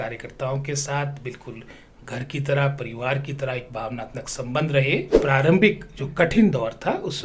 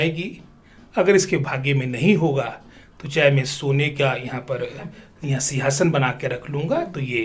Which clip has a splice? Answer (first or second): first